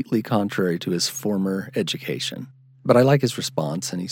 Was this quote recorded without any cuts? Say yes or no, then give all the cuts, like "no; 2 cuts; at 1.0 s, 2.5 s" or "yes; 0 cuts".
yes; 0 cuts